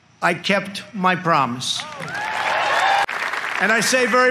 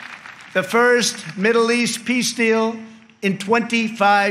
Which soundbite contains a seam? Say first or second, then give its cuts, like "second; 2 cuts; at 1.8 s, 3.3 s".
first; 1 cut; at 3.1 s